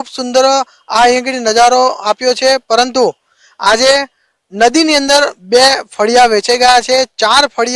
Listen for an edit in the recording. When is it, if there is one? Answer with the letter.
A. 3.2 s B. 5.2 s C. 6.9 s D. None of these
C